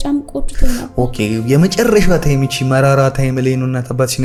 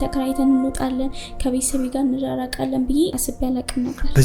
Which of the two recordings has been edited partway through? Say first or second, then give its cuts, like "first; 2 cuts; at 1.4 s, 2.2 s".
second; 1 cut; at 3.2 s